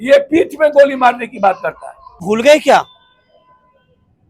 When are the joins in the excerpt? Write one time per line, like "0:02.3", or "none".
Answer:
0:02.2

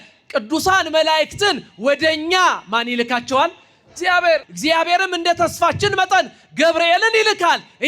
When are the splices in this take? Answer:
0:04.5

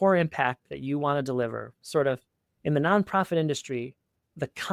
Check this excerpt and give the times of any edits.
none

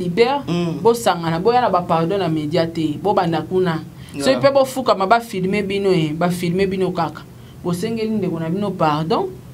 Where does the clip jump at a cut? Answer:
none

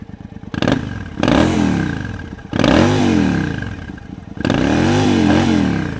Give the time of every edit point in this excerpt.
none

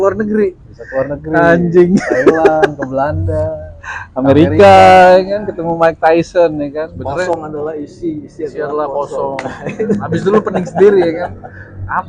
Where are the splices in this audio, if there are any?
0:07.3

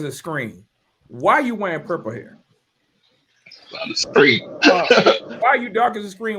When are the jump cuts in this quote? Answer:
0:05.3

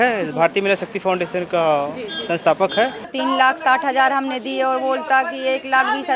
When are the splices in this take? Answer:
0:03.1

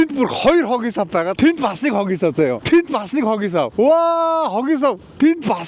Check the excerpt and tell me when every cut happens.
0:01.3

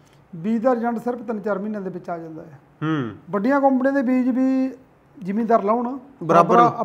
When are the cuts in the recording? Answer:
none

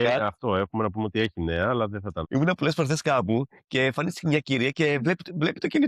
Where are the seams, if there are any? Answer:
0:02.2

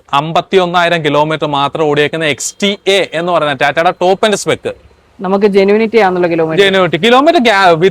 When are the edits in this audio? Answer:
none

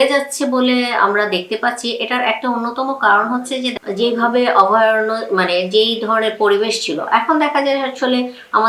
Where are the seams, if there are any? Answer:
0:03.7

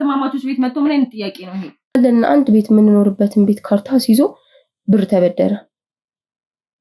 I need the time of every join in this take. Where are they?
0:01.9

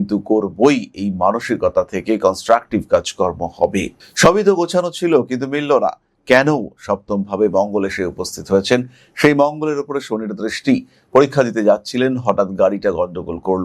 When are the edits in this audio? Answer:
0:03.9

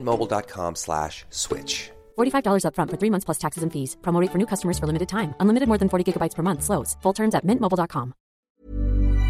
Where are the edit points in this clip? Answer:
0:08.4

